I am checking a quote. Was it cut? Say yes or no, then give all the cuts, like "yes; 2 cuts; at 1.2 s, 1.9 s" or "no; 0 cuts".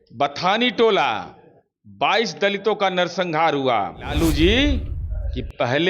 yes; 1 cut; at 4.1 s